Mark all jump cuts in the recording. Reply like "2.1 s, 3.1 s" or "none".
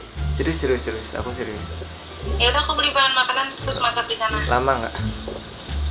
none